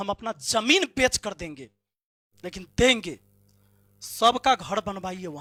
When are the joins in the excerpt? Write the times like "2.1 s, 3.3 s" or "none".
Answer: none